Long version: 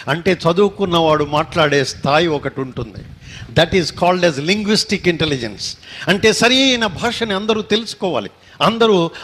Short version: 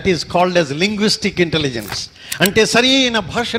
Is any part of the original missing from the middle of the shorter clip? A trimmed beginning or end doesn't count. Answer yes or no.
no